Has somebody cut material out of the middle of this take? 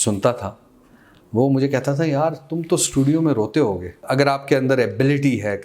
yes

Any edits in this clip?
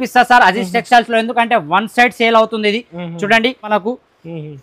yes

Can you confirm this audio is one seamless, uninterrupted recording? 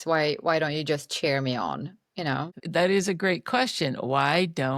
no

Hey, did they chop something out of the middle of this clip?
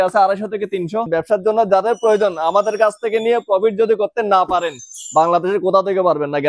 yes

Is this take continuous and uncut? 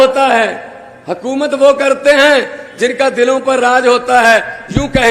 yes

